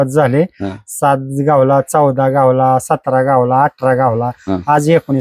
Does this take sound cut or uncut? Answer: uncut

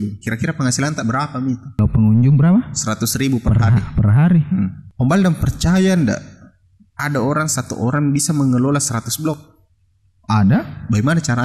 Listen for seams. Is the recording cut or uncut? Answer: cut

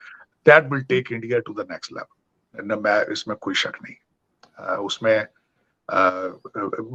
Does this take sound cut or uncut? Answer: uncut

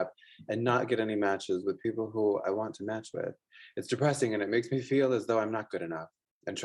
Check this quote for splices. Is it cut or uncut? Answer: uncut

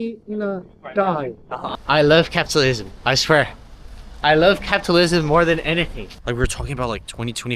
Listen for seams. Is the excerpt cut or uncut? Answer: cut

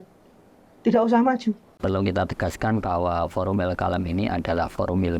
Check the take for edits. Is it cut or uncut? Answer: cut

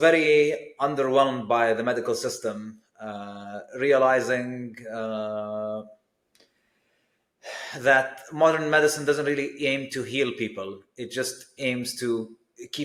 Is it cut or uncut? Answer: uncut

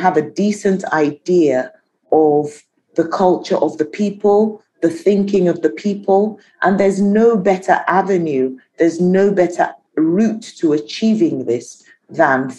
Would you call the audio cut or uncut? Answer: uncut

